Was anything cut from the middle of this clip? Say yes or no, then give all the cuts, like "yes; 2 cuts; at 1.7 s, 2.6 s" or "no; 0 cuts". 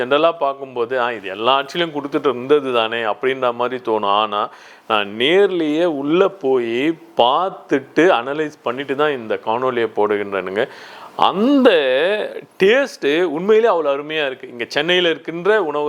no; 0 cuts